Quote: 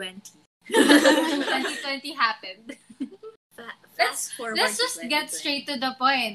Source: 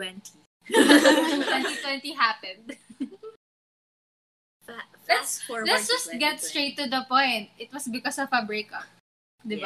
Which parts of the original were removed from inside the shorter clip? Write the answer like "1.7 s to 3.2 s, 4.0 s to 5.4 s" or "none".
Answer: 3.5 s to 4.6 s